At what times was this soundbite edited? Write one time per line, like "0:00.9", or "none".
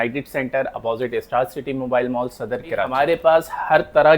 0:02.9